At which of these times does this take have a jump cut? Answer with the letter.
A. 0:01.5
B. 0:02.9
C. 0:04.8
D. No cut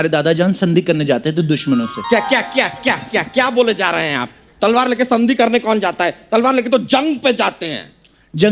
D